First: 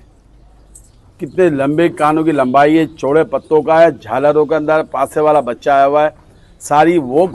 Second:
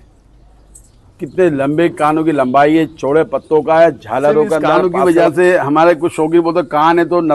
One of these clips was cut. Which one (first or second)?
second